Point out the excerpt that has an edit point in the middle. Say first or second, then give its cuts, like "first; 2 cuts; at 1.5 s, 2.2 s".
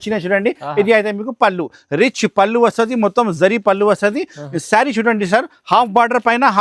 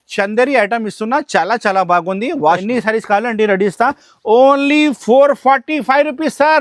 second; 1 cut; at 2.6 s